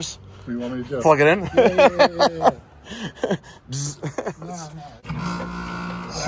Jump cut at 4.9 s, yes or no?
yes